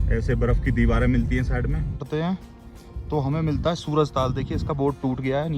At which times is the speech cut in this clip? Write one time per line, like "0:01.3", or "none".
0:02.0